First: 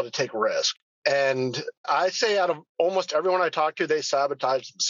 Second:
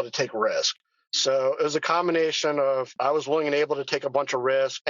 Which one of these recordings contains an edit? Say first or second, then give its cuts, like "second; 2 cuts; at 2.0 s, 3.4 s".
second; 2 cuts; at 0.9 s, 2.9 s